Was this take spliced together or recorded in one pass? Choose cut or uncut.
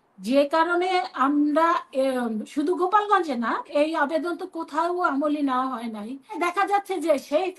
cut